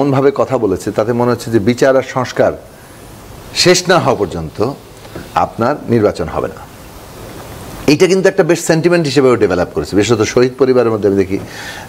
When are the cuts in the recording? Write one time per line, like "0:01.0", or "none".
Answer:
none